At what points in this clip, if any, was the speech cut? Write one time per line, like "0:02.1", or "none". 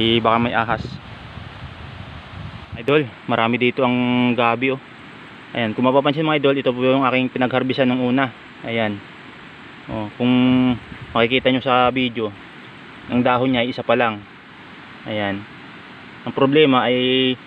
0:02.8